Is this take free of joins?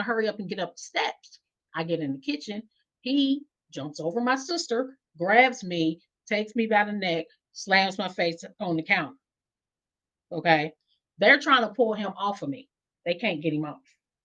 yes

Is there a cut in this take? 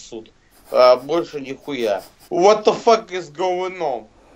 yes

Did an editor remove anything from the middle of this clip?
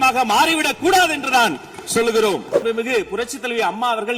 yes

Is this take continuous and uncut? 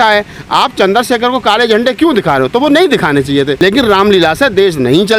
no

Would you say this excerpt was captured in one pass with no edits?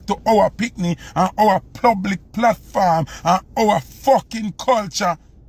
yes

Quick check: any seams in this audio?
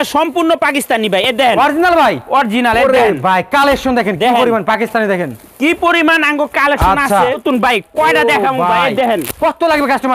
yes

